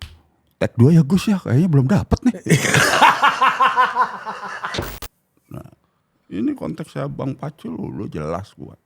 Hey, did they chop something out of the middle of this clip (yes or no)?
yes